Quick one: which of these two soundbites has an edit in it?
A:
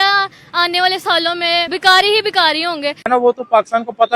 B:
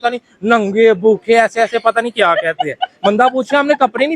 A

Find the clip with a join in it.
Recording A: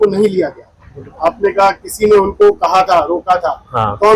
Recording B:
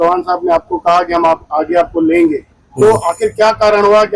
A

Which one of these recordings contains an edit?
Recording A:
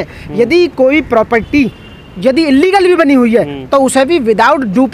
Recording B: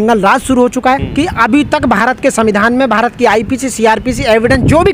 B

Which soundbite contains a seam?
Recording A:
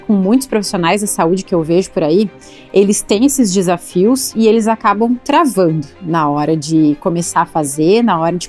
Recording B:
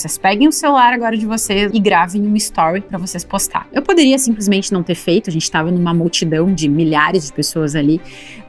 B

